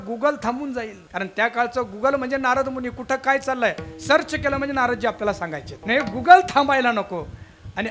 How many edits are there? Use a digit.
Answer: 2